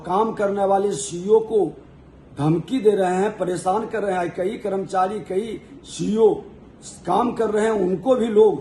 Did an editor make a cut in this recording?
no; 0 cuts

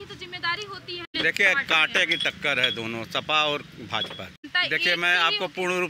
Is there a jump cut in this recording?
yes; 2 cuts; at 1.1 s, 4.4 s

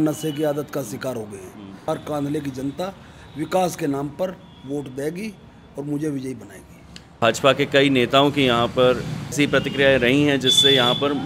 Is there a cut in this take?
yes; 3 cuts; at 1.9 s, 7.1 s, 9.3 s

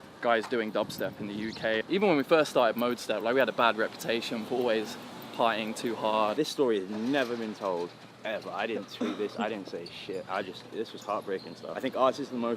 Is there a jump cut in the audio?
yes; 3 cuts; at 1.8 s, 6.3 s, 11.7 s

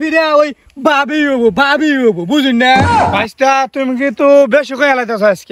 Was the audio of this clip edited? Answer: yes; 1 cut; at 3.0 s

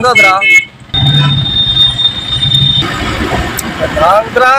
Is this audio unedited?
yes; 0 cuts

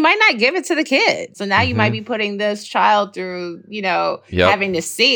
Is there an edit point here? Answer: yes; 1 cut; at 1.4 s

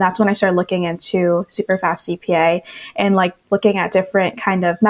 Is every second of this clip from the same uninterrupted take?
yes; 0 cuts

